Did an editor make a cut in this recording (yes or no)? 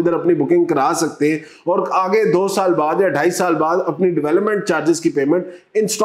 no